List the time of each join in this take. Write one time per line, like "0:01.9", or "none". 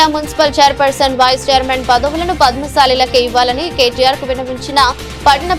none